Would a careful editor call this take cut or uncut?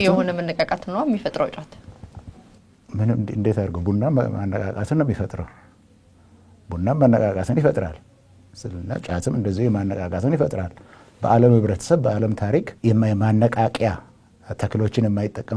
uncut